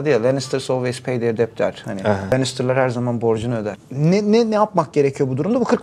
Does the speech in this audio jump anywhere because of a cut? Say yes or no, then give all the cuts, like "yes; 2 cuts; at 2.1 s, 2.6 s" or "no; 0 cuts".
yes; 1 cut; at 3.8 s